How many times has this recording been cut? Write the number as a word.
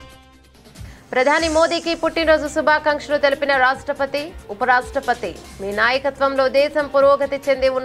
one